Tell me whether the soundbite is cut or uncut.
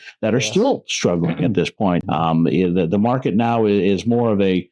cut